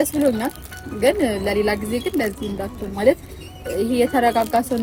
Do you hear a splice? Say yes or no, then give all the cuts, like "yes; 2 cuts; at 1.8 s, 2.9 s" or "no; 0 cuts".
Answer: no; 0 cuts